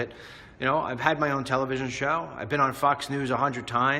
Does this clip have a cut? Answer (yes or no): yes